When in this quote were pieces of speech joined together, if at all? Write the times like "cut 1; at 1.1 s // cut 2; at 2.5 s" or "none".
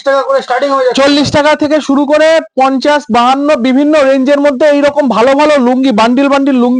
none